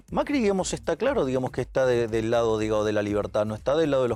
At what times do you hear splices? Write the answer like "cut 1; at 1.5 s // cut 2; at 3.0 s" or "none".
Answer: none